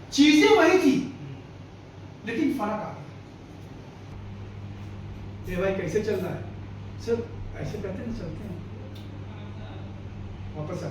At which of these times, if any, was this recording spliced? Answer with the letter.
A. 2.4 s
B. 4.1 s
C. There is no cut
B